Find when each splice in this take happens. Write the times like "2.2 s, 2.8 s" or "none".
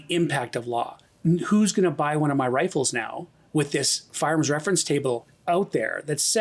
1.0 s, 5.3 s